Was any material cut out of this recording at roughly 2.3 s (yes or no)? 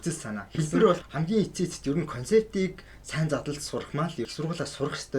no